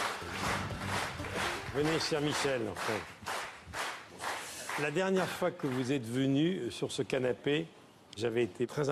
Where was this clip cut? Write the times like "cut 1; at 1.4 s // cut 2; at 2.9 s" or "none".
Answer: none